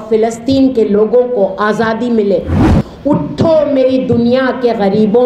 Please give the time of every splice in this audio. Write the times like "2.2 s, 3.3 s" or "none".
2.5 s